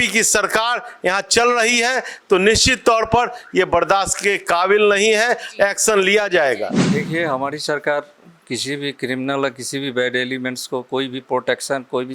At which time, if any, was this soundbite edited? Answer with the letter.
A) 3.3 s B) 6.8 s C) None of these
B